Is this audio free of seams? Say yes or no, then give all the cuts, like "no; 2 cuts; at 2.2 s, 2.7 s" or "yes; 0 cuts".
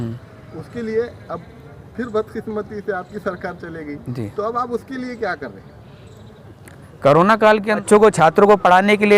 no; 1 cut; at 7.8 s